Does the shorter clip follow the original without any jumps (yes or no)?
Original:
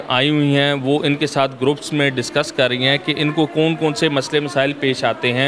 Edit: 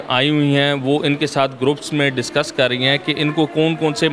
yes